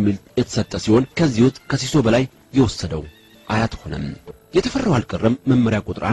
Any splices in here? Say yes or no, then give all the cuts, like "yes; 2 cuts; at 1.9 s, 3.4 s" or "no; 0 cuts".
yes; 1 cut; at 4.2 s